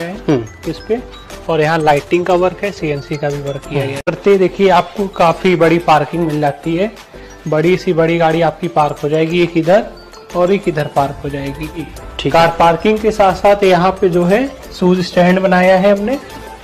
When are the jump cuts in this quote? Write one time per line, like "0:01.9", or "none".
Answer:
0:04.2